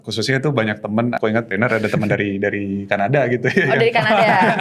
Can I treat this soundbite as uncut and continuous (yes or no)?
no